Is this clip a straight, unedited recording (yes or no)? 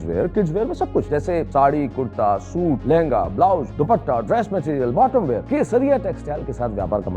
no